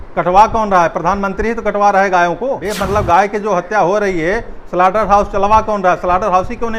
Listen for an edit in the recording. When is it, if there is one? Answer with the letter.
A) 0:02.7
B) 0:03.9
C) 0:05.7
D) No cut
A